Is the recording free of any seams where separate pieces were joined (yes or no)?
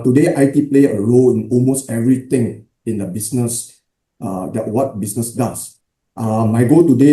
yes